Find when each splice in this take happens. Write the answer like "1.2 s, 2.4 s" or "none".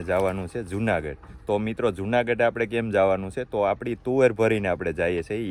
none